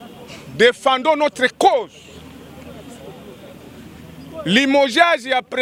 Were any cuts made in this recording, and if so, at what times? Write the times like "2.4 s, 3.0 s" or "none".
none